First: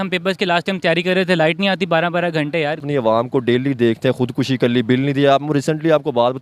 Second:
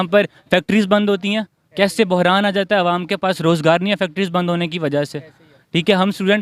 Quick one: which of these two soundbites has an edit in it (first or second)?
first